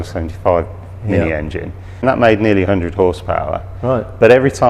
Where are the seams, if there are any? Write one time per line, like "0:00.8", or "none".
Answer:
0:02.0